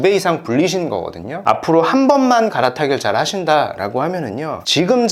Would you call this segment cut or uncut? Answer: cut